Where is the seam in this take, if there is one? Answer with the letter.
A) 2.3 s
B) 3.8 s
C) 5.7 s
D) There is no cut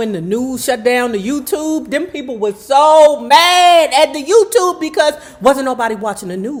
D